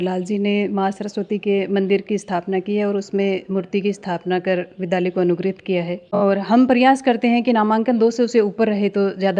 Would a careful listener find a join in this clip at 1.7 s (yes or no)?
no